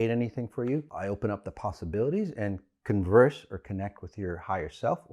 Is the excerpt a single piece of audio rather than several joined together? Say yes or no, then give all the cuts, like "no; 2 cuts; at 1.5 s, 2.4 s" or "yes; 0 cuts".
no; 1 cut; at 0.9 s